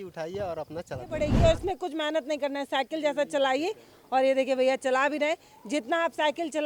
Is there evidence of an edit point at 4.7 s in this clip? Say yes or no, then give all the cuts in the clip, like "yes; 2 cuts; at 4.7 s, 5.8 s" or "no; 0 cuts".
no; 1 cut; at 1.4 s